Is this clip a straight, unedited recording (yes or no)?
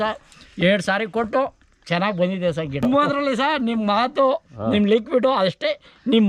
no